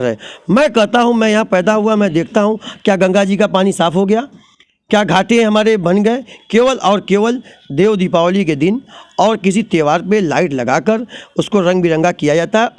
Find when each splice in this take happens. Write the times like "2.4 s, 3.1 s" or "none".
none